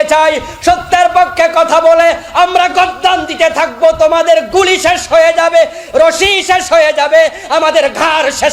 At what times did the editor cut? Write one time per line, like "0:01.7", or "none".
none